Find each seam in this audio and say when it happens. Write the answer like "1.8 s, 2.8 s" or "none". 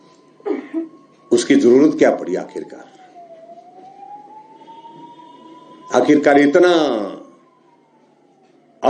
none